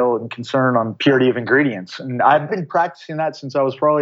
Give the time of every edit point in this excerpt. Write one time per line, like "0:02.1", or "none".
0:00.9
0:02.5